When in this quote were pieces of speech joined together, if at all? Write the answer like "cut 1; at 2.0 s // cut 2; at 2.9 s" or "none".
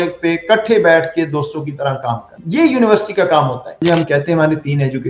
cut 1; at 2.3 s // cut 2; at 3.8 s

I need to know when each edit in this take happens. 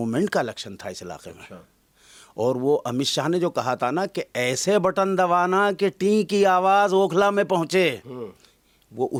none

